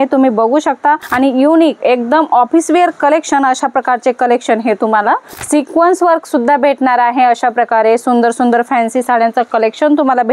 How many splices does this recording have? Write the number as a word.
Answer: two